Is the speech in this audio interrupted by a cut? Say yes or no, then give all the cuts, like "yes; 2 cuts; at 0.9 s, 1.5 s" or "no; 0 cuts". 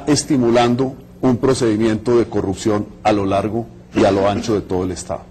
no; 0 cuts